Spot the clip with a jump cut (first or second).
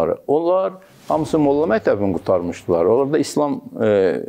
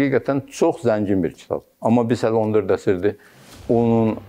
second